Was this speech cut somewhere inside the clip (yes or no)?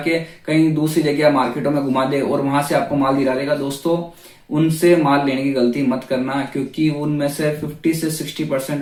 no